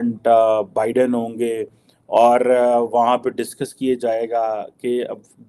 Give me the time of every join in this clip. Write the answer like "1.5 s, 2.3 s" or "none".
none